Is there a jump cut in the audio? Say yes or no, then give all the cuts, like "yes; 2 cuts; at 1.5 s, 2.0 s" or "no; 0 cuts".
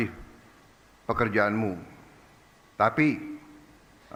no; 0 cuts